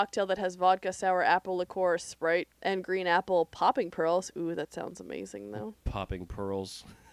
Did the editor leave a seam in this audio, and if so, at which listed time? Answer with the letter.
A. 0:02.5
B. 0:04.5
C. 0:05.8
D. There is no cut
A